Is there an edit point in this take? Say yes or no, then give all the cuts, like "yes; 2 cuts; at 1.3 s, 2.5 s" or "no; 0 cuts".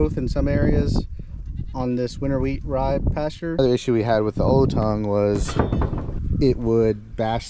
yes; 1 cut; at 3.5 s